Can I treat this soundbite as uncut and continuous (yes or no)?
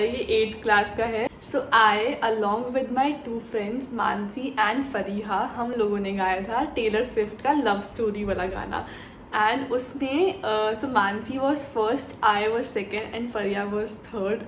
yes